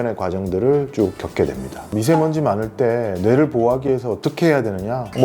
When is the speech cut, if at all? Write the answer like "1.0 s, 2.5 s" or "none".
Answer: 1.9 s